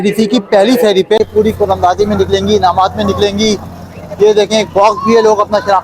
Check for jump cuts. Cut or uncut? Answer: cut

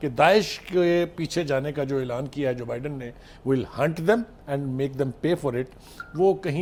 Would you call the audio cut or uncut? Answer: uncut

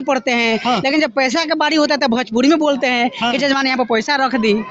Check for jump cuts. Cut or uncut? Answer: uncut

